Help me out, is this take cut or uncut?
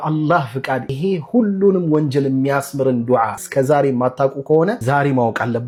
uncut